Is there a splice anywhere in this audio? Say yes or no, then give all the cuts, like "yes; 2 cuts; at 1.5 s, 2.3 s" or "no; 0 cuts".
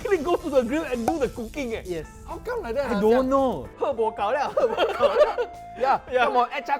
yes; 1 cut; at 3.7 s